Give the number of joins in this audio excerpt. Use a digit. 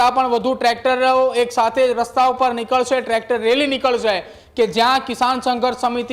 0